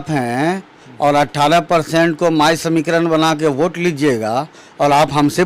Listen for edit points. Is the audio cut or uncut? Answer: uncut